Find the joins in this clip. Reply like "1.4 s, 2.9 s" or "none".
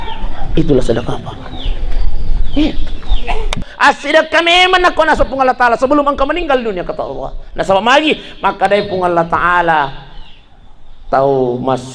3.7 s